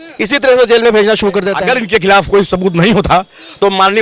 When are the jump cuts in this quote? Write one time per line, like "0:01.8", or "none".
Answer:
0:01.5